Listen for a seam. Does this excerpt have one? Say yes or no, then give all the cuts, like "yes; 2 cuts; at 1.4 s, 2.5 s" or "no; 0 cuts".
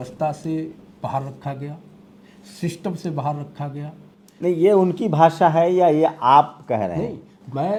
no; 0 cuts